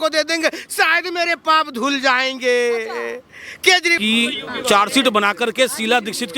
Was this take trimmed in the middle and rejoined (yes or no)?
yes